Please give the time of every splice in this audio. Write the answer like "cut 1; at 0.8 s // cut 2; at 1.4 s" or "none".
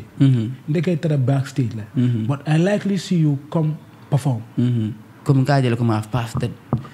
cut 1; at 5.1 s